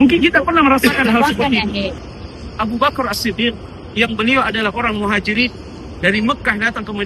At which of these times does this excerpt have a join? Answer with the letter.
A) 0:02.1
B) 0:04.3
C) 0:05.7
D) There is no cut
A